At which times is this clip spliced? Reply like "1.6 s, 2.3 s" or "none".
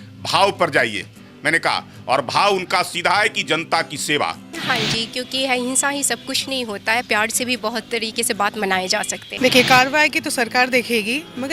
4.5 s, 9.2 s